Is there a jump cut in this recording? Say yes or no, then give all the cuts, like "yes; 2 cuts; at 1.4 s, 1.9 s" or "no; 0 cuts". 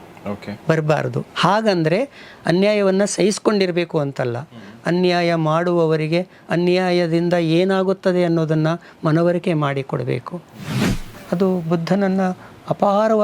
yes; 1 cut; at 10.9 s